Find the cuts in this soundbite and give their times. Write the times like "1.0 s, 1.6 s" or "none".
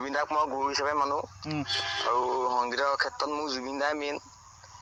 none